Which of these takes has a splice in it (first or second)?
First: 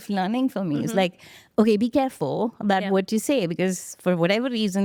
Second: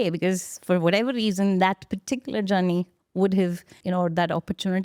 second